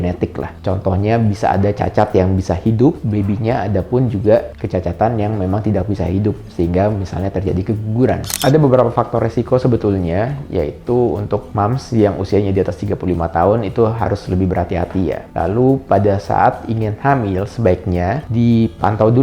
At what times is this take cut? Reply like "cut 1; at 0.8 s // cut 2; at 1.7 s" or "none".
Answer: cut 1; at 8.3 s